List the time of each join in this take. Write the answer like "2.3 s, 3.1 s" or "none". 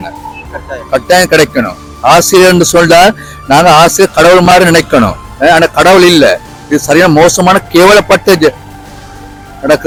none